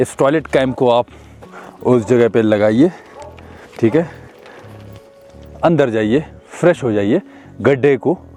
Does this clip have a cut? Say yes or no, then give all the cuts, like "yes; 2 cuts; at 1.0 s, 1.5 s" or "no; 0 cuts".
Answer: no; 0 cuts